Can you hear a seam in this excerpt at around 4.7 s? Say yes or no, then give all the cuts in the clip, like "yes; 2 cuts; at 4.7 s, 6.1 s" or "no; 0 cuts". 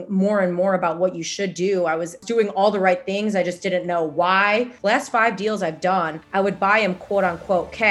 yes; 3 cuts; at 2.2 s, 4.7 s, 6.2 s